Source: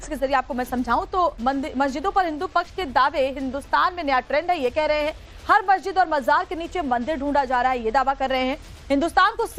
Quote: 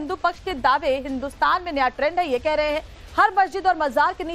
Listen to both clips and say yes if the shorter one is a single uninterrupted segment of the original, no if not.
yes